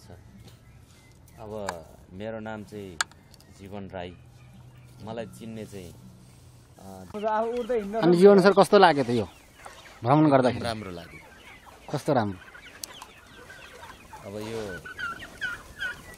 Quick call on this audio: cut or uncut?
cut